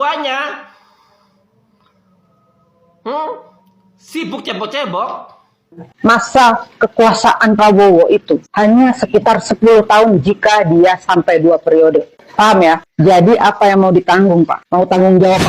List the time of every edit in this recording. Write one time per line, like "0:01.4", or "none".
0:05.9